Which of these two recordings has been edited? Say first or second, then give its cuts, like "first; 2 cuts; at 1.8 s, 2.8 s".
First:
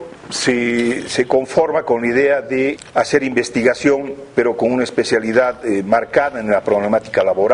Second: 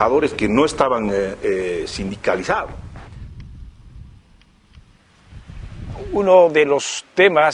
second; 1 cut; at 6.3 s